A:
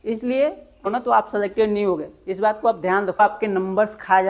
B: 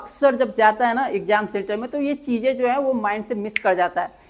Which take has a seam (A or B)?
A